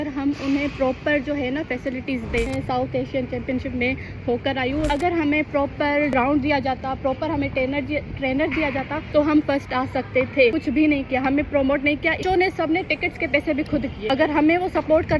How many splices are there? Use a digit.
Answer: 7